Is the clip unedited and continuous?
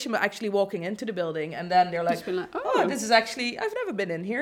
yes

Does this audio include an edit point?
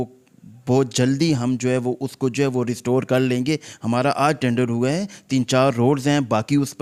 no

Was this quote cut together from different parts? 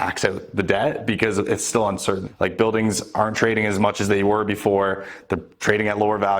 yes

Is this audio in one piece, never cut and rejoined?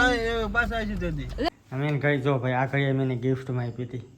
no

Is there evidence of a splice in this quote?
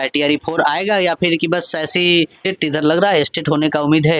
yes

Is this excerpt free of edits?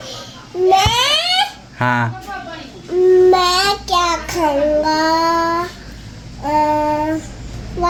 yes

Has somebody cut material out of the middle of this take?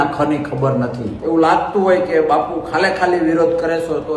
yes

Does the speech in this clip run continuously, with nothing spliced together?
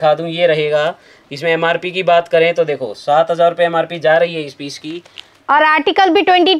yes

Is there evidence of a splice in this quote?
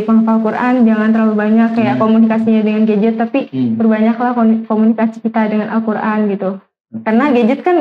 no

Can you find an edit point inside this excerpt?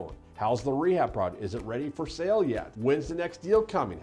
yes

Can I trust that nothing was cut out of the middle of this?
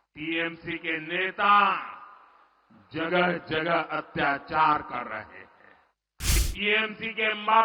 no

